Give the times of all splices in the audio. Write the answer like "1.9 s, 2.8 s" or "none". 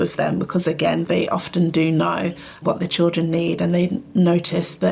1.0 s